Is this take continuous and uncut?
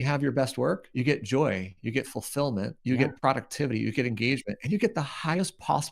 no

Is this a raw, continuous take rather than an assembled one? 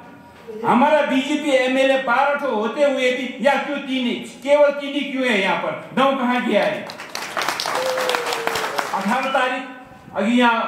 no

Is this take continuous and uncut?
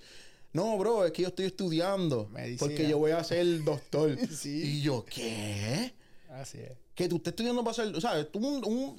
yes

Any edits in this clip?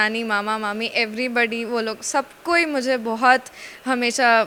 no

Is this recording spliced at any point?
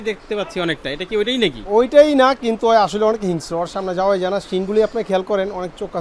no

